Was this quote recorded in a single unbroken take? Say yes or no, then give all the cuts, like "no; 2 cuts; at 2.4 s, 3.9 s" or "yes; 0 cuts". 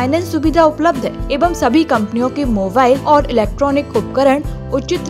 no; 2 cuts; at 1.3 s, 3.0 s